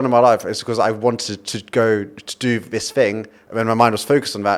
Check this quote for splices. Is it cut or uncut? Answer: uncut